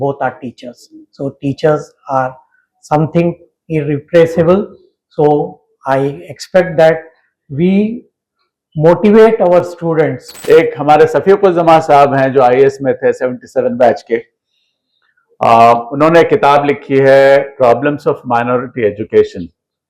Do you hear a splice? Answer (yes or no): yes